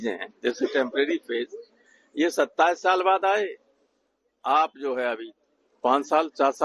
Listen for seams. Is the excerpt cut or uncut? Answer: uncut